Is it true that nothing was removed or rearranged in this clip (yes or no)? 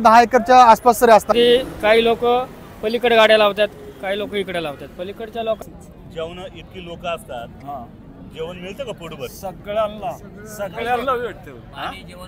no